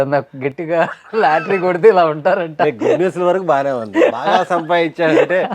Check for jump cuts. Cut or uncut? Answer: uncut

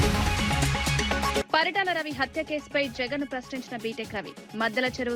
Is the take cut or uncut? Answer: cut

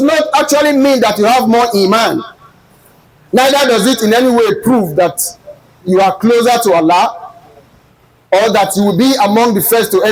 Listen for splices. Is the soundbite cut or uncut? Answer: uncut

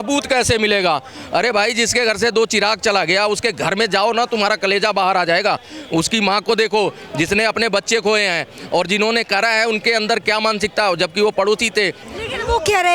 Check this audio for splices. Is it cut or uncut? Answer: uncut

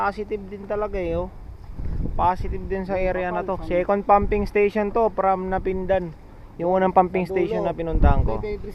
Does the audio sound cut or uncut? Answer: uncut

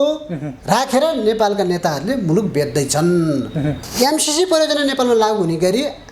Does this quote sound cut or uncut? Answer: cut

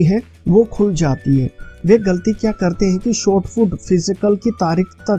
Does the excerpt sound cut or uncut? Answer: cut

